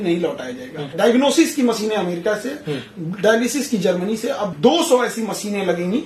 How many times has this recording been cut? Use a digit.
2